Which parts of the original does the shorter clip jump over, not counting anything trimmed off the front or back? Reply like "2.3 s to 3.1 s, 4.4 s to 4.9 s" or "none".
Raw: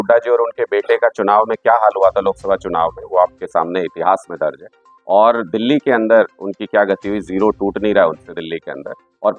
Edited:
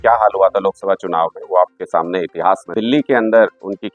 4.3 s to 5.4 s